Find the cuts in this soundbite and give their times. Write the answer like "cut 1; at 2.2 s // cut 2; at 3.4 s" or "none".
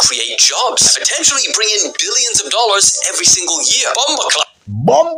none